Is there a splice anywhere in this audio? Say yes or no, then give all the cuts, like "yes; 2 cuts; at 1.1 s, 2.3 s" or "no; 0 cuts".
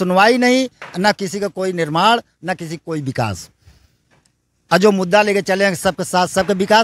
no; 0 cuts